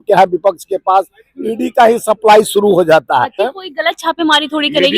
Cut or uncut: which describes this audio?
cut